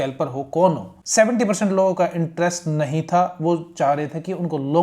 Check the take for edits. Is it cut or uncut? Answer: cut